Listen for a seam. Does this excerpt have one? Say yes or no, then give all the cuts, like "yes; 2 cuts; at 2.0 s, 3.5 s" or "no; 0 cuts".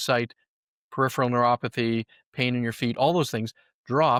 no; 0 cuts